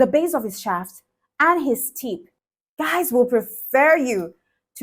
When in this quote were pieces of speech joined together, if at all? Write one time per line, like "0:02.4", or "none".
0:02.3